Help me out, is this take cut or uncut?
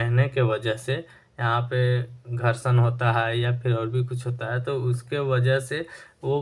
uncut